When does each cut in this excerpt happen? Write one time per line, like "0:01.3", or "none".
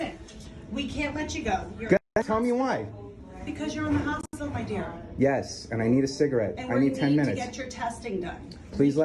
none